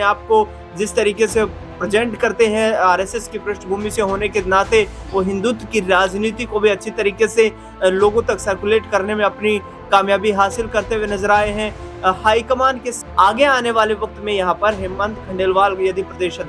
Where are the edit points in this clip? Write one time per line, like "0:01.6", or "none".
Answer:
0:12.9